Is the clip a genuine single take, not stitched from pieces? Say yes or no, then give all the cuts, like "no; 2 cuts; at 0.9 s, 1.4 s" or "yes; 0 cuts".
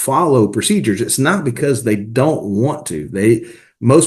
yes; 0 cuts